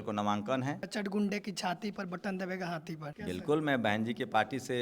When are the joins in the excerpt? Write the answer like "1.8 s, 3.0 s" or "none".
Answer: 0.9 s, 3.1 s